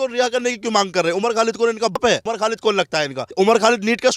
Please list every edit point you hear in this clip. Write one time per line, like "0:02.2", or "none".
0:01.9
0:03.2